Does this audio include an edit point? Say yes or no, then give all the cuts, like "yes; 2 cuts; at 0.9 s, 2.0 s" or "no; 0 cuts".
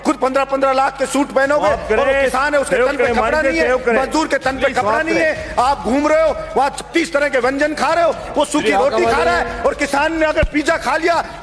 no; 0 cuts